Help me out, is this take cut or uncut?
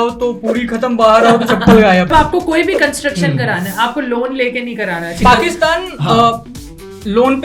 cut